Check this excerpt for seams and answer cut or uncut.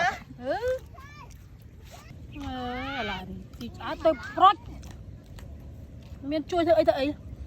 cut